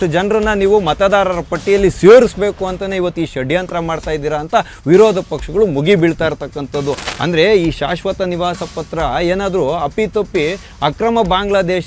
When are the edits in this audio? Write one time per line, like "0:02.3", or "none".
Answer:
0:07.0